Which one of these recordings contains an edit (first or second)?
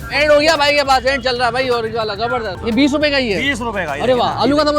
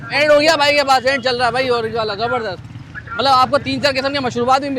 first